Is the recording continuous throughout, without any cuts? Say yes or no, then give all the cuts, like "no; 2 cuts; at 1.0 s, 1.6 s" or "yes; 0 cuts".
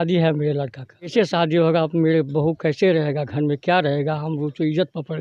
no; 1 cut; at 1.1 s